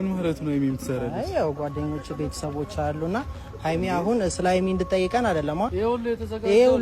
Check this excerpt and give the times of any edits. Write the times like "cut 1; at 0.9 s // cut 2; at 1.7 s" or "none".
cut 1; at 5.7 s